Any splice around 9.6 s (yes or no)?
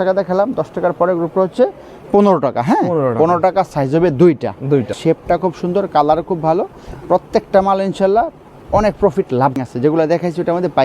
yes